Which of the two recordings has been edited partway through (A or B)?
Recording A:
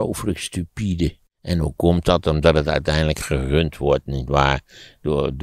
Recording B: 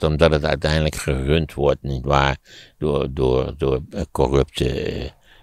A